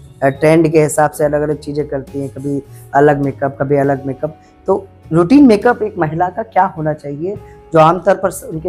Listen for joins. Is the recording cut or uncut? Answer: uncut